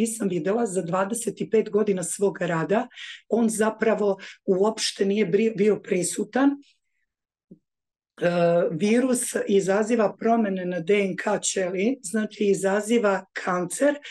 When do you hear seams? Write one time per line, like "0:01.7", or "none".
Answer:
none